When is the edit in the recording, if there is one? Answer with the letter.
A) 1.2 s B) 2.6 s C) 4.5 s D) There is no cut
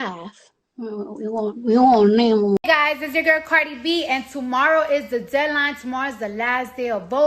B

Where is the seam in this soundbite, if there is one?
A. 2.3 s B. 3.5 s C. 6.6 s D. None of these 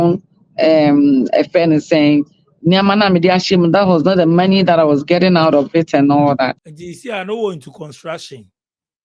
C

